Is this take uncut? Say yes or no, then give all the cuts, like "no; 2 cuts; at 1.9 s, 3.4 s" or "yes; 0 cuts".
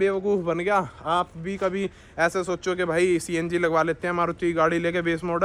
yes; 0 cuts